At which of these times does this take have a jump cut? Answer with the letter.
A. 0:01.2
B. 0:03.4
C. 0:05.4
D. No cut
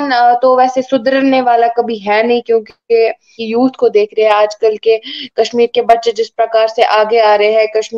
B